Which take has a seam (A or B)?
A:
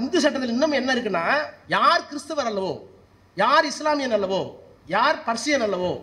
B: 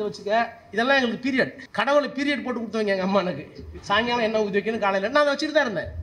B